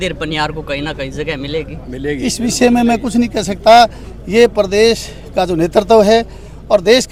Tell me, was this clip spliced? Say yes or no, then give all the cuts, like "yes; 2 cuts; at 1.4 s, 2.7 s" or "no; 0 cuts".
no; 0 cuts